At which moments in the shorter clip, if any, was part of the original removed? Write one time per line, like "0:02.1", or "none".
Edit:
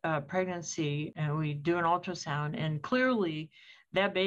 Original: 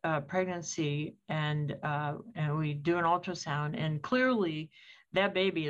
0:01.1